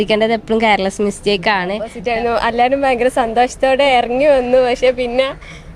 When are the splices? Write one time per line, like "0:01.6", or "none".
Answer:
0:02.0